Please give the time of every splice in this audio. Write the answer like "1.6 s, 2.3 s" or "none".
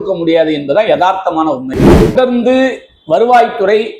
2.1 s